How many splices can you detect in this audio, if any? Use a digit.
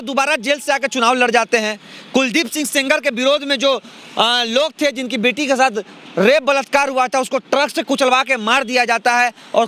0